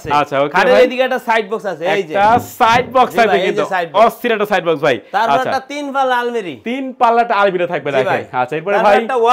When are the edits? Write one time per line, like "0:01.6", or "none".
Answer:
none